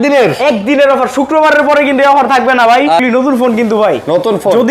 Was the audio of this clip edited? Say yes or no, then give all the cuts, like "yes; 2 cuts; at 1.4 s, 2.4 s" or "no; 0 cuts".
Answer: yes; 1 cut; at 3.0 s